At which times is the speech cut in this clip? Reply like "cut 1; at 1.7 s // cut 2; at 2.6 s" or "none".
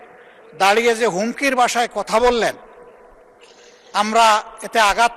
none